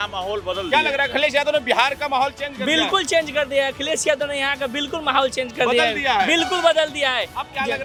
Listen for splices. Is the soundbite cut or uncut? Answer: uncut